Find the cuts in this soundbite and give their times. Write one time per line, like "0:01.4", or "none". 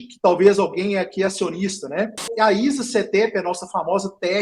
0:02.3